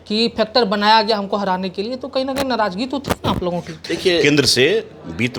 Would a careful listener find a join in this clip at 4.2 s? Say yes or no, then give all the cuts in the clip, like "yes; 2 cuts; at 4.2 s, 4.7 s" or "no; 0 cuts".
yes; 1 cut; at 4.2 s